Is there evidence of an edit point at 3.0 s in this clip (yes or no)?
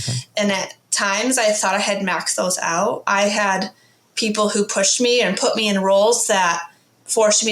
yes